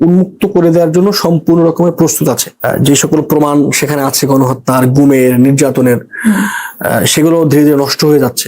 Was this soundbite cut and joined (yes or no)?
yes